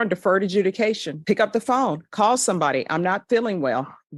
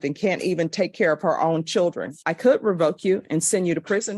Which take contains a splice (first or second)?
second